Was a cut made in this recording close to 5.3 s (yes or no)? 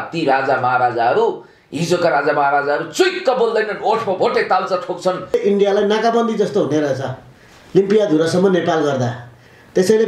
yes